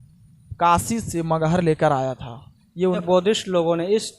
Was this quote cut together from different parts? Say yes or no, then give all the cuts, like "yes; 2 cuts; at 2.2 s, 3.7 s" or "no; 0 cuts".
yes; 1 cut; at 3.0 s